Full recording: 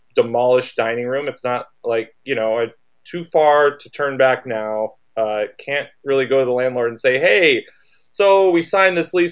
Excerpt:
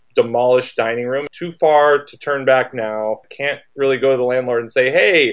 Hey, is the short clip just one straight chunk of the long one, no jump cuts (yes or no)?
no